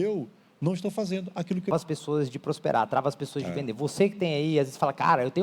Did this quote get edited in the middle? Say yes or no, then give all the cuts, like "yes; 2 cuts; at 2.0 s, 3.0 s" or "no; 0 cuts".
yes; 1 cut; at 1.7 s